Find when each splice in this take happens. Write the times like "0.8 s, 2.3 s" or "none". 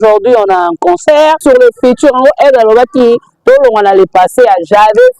1.4 s